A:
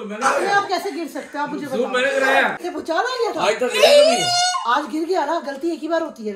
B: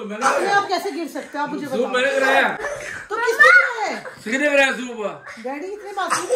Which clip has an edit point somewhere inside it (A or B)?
A